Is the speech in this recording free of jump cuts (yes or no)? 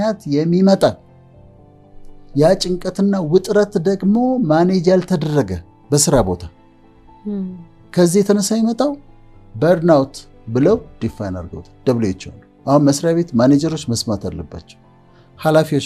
yes